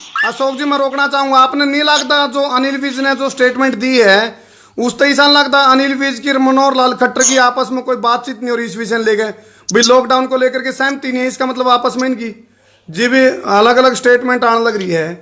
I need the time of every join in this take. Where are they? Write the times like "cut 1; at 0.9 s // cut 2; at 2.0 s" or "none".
none

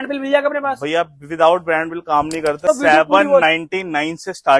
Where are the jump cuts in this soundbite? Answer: cut 1; at 2.7 s

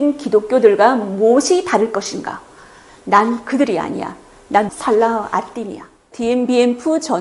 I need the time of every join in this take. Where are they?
cut 1; at 6.1 s

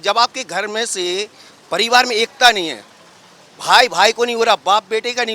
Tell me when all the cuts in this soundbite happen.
none

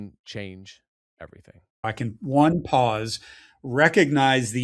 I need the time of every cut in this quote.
cut 1; at 1.8 s

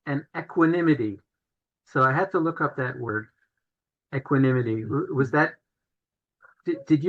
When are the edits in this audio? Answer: none

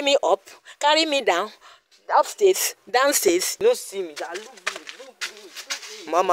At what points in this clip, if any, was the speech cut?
cut 1; at 3.5 s

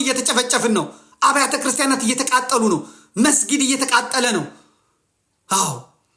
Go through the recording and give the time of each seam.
none

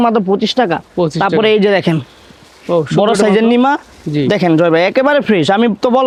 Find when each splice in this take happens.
none

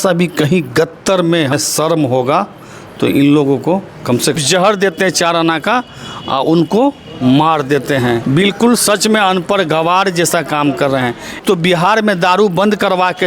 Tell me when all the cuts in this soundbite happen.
cut 1; at 1.5 s // cut 2; at 4.4 s // cut 3; at 8.2 s // cut 4; at 11.4 s

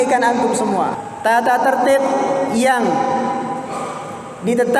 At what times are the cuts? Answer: cut 1; at 1.0 s

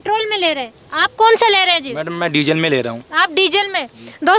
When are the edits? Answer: none

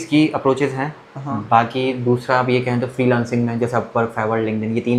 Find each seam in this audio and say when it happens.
none

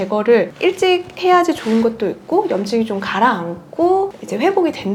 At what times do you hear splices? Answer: none

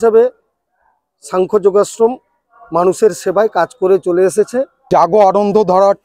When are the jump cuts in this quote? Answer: cut 1; at 4.8 s

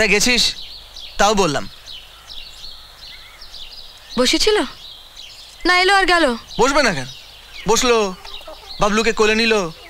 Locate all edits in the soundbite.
none

